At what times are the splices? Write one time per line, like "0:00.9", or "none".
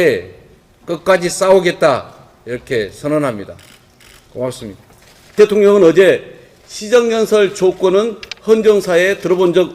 0:05.4